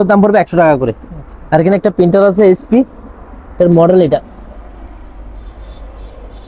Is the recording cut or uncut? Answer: uncut